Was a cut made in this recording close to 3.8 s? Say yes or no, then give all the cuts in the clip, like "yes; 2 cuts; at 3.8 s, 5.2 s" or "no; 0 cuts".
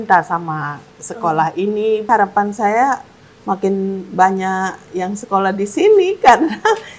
no; 1 cut; at 2.1 s